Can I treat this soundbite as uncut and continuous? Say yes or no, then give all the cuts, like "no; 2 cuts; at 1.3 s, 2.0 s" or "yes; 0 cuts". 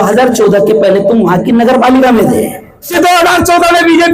no; 1 cut; at 2.9 s